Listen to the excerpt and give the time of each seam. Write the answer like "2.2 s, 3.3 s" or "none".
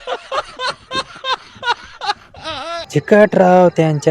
2.8 s